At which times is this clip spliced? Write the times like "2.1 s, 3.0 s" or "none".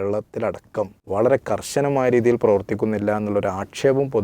1.0 s